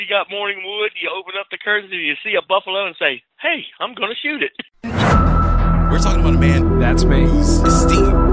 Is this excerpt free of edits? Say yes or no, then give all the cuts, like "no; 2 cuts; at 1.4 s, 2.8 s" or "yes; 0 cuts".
no; 1 cut; at 4.7 s